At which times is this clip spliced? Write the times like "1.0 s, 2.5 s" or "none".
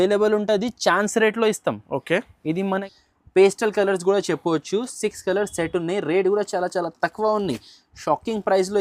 2.9 s